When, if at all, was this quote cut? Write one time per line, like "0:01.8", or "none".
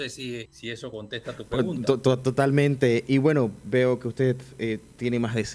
0:00.9